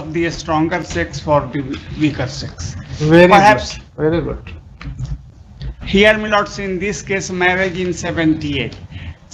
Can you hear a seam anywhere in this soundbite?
no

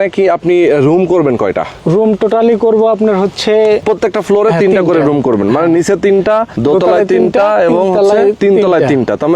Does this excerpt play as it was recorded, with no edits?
no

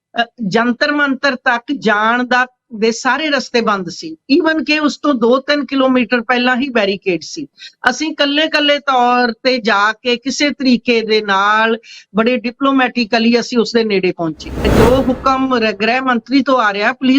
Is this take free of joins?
no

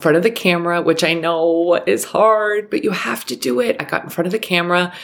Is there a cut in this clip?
no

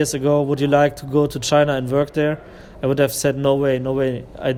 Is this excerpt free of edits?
yes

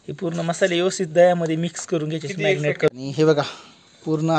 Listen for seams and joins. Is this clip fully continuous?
no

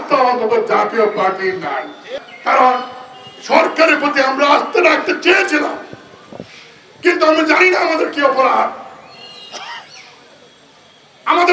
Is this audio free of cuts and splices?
no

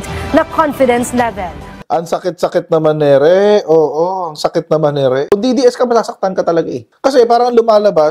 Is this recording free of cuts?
no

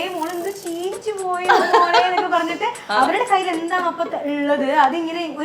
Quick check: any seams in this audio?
no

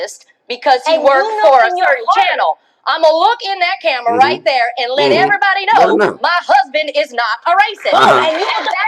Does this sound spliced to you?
no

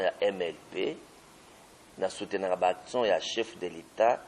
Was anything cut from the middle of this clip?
no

